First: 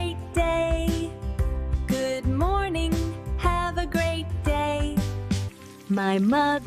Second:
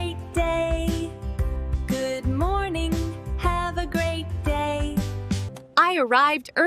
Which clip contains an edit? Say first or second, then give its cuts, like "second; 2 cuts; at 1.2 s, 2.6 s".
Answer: first; 1 cut; at 5.5 s